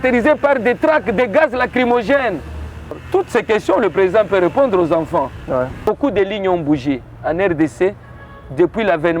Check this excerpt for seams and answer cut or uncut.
cut